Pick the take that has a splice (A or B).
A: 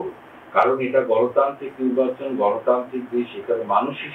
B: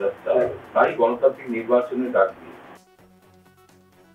B